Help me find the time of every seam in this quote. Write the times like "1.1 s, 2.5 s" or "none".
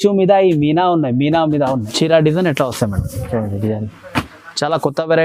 1.9 s